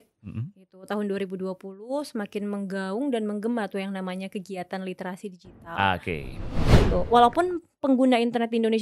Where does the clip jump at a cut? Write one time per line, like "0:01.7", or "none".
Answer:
0:06.9